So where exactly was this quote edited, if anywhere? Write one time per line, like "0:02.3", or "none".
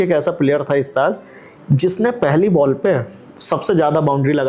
none

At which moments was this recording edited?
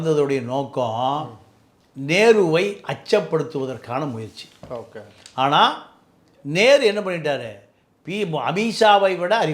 none

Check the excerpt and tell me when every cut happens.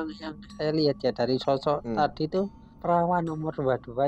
0:02.7

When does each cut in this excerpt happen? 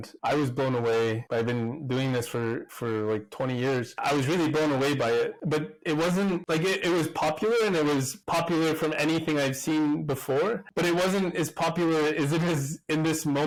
none

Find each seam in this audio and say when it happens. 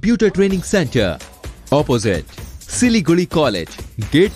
none

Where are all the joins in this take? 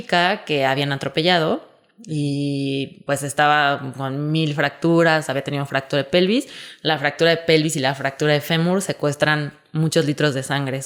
none

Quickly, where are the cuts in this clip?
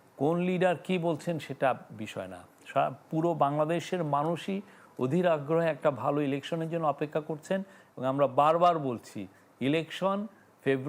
none

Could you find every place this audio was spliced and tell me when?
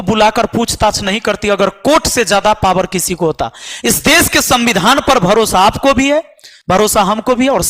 none

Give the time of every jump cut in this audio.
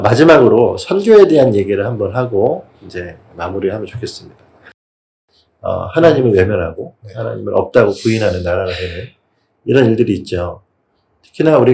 0:05.1

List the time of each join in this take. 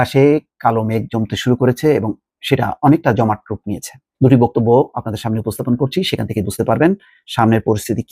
none

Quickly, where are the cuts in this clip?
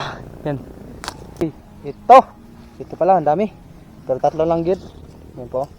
0:01.4

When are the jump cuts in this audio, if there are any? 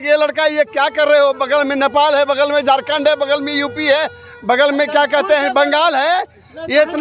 none

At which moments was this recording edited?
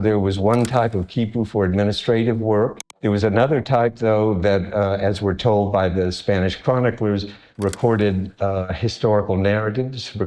0:02.8

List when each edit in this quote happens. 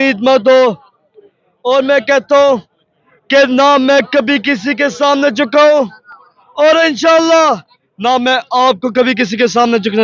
none

